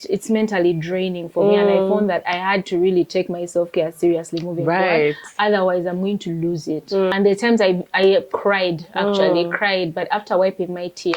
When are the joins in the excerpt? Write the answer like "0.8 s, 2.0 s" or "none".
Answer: 7.1 s